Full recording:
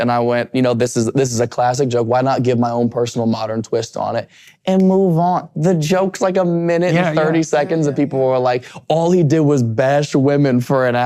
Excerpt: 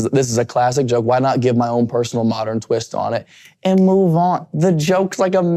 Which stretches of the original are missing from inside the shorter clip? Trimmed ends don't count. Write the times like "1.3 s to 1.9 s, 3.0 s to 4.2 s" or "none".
none

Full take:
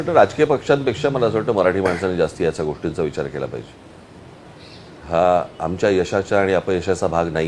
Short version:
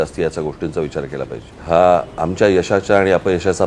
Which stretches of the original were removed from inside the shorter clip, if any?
3.7 s to 4.9 s

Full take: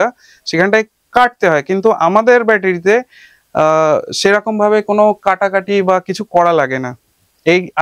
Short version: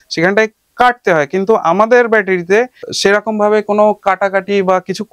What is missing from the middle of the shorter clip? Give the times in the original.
3.3 s to 4.1 s

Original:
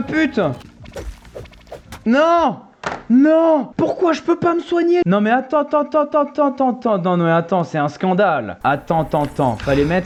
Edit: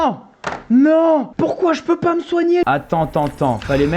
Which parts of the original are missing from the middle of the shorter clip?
5.1 s to 8.6 s

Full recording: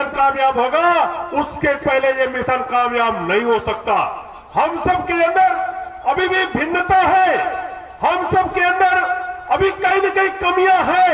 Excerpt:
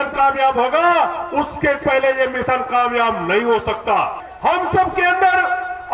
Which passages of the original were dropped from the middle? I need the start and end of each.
4.2 s to 7.8 s

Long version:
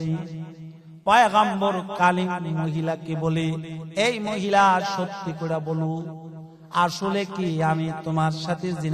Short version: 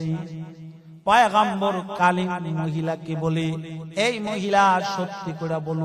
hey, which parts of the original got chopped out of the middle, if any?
none

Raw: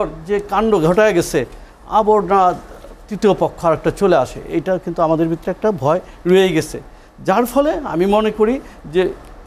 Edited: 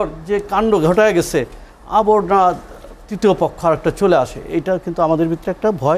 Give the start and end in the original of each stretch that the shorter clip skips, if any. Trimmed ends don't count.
none

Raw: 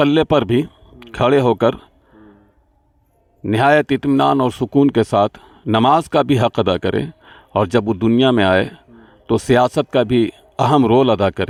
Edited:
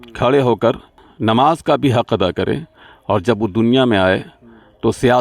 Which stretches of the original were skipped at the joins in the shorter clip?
2.0 s to 5.5 s

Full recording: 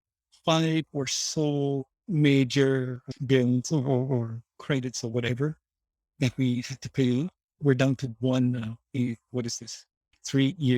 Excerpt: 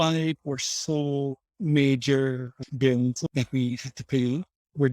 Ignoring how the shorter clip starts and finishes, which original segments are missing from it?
3.7 s to 6.0 s

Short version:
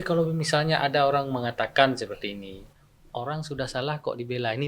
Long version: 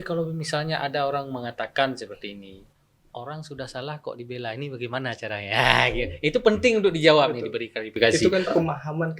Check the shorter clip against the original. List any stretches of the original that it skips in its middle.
none

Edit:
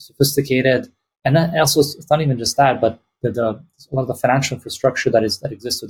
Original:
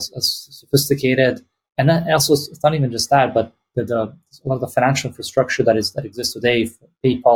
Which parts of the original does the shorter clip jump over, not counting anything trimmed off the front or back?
none

